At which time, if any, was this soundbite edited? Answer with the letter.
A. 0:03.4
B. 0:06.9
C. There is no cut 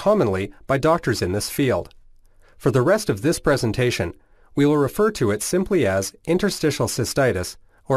B